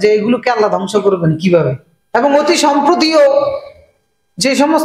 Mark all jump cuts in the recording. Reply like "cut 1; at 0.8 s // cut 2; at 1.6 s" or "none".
cut 1; at 1.9 s